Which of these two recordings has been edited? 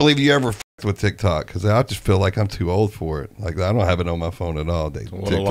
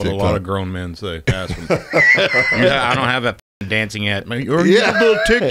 second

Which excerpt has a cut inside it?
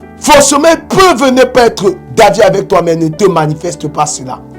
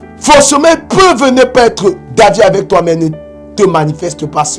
first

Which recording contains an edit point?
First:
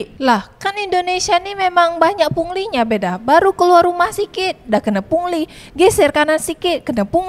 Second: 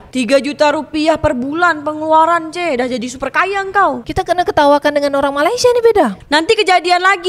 second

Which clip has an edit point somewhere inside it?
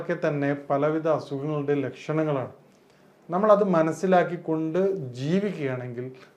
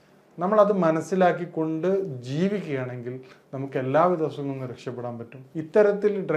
second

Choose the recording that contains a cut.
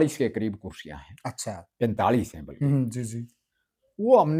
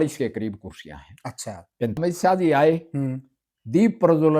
second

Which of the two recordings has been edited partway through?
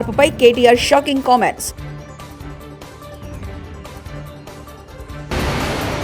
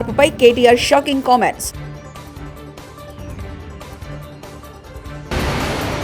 second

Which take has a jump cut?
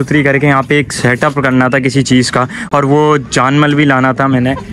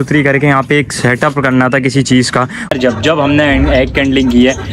second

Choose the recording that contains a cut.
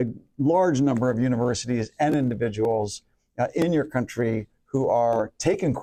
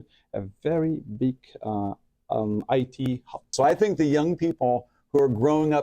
second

